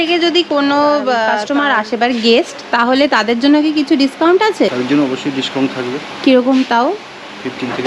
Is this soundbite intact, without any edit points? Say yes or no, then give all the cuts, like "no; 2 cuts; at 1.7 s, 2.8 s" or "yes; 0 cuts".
no; 2 cuts; at 1.4 s, 4.7 s